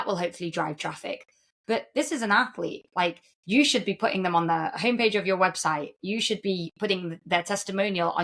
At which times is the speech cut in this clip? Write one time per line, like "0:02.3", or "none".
none